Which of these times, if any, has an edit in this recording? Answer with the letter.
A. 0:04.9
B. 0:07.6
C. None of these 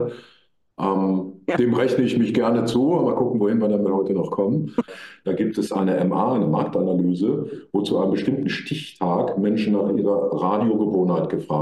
A